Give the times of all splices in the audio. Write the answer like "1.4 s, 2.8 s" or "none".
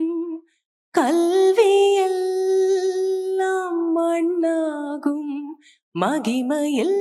none